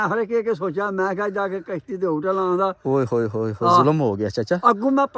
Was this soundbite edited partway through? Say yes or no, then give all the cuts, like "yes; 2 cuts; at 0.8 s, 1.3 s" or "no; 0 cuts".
no; 0 cuts